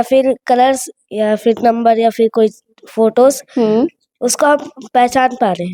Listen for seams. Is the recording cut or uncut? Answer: uncut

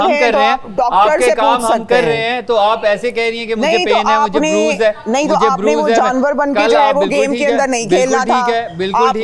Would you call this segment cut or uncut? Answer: uncut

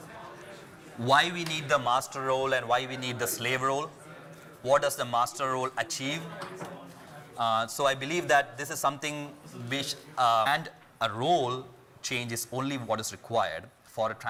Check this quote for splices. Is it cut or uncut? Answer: uncut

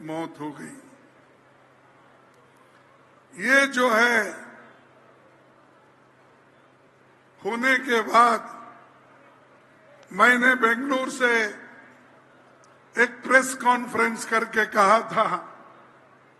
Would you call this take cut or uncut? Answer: uncut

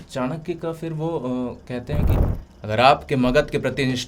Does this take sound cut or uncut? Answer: cut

